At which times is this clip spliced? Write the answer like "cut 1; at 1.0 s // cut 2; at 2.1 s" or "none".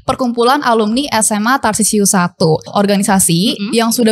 cut 1; at 2.7 s